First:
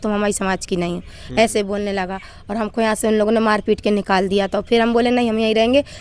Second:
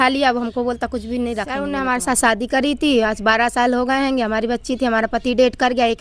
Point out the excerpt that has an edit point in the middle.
second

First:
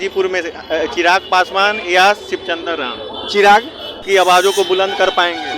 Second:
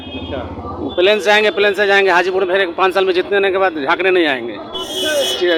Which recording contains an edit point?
first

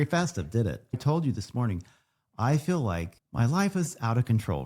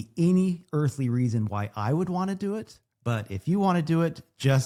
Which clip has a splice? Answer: first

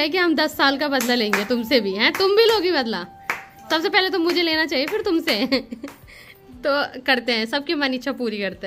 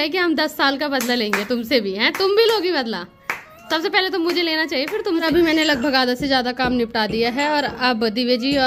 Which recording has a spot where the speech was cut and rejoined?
second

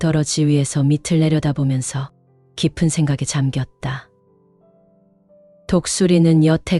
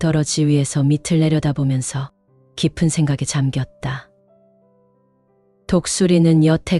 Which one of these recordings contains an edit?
second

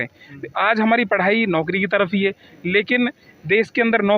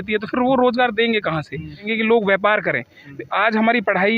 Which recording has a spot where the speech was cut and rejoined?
second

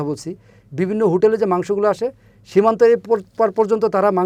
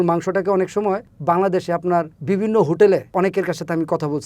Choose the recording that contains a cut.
second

